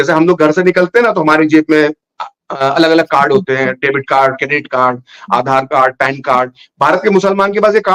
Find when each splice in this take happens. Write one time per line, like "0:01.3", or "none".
none